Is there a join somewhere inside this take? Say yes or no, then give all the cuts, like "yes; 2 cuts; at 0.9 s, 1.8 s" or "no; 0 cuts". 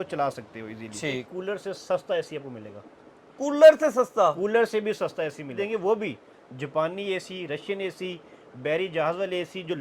yes; 2 cuts; at 1.2 s, 5.5 s